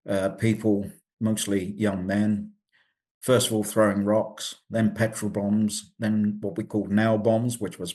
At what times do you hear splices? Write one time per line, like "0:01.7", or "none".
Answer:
none